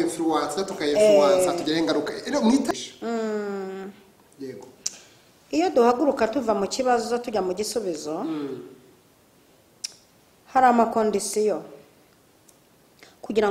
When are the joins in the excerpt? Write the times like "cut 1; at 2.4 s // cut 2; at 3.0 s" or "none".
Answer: cut 1; at 2.7 s